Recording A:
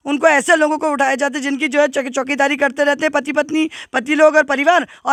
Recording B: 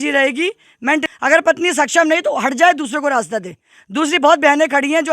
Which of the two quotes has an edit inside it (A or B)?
B